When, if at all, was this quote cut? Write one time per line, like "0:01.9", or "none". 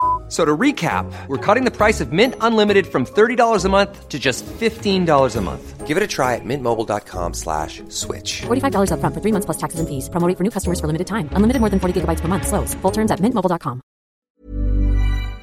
0:14.4